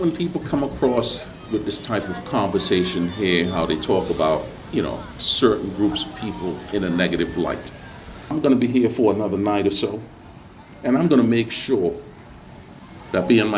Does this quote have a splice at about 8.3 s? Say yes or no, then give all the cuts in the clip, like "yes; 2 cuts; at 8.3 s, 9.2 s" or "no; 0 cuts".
yes; 1 cut; at 8.3 s